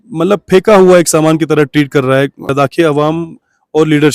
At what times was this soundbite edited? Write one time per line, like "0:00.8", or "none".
0:02.5